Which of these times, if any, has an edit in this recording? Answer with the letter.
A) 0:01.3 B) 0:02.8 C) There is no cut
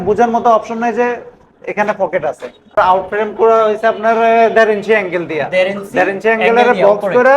B